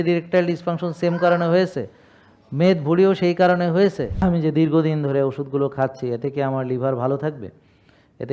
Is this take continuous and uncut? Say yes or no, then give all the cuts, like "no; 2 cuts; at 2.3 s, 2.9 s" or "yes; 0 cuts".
no; 1 cut; at 4.2 s